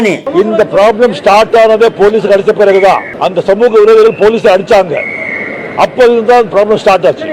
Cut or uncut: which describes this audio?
uncut